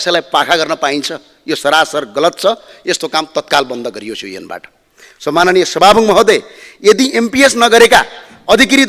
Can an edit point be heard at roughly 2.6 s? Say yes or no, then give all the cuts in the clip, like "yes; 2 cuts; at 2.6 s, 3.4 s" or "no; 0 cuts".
no; 0 cuts